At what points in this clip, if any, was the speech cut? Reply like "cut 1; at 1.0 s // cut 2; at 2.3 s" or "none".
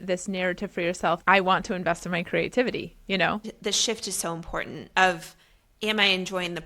cut 1; at 1.2 s // cut 2; at 3.5 s